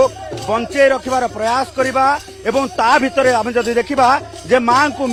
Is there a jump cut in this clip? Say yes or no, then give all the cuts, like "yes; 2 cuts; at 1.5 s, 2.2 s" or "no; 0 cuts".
no; 0 cuts